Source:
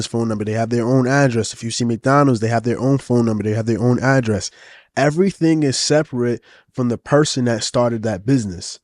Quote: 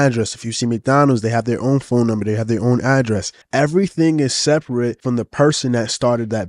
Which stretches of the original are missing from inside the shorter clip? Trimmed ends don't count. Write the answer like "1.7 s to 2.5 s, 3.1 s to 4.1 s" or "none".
4.5 s to 4.8 s, 6.4 s to 6.7 s

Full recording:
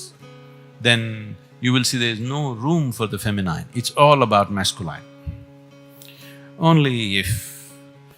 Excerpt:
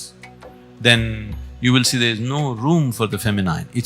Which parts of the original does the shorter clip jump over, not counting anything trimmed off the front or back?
none

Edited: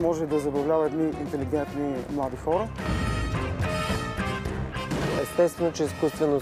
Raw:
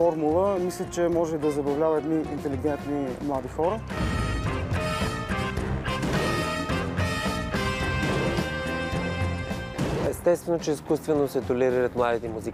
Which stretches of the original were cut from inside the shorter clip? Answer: 6.2 s to 9.9 s

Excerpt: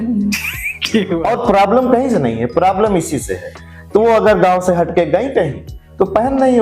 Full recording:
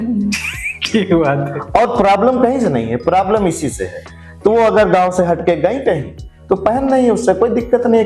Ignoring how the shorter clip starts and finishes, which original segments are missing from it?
1.1 s to 1.7 s

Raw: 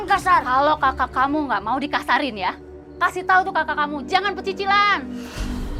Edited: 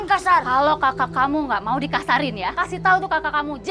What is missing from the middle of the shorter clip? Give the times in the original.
2.5 s to 3.0 s

